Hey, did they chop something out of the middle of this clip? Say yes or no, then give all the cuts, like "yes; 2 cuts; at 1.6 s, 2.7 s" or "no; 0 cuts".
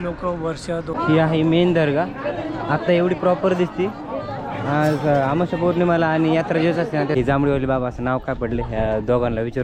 yes; 2 cuts; at 0.9 s, 7.1 s